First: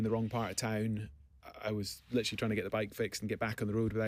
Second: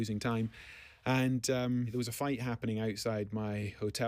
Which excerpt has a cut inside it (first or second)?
second